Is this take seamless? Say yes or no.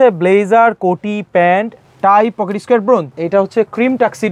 no